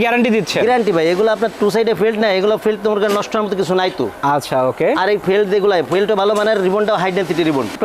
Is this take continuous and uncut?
yes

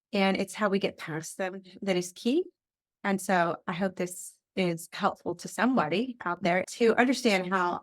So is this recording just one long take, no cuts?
no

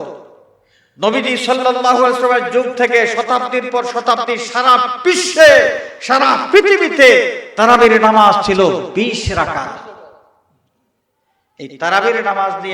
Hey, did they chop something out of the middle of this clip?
no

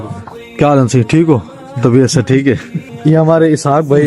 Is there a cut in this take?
yes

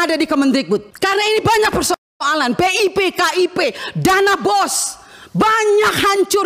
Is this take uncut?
no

